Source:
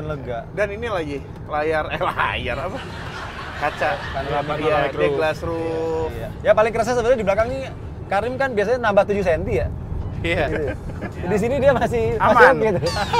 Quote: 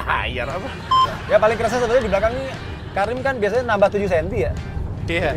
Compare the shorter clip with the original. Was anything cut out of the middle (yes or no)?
yes